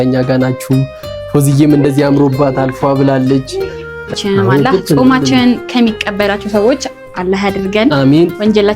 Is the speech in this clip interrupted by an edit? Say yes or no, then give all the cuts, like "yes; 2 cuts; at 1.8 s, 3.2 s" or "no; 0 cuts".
yes; 1 cut; at 4.1 s